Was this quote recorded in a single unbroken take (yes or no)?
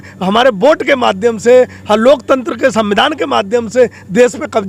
yes